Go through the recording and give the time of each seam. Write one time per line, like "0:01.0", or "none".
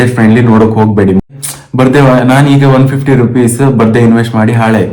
0:01.2